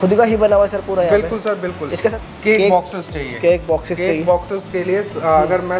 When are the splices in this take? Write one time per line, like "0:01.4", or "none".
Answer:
0:02.2